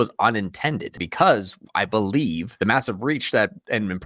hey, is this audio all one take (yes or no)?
no